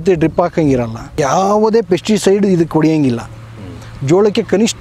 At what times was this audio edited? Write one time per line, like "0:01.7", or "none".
0:01.1